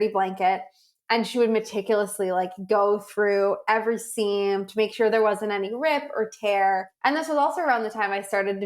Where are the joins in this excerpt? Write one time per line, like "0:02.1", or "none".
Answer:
0:06.9